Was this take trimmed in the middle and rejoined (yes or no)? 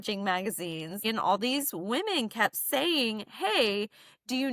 yes